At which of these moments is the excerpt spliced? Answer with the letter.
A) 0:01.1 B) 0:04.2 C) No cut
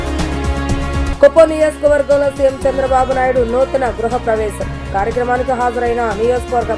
A